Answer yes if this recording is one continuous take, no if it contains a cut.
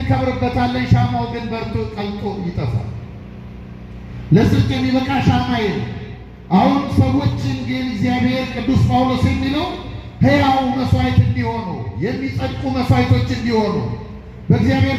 yes